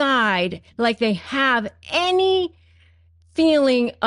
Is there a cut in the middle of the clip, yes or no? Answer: no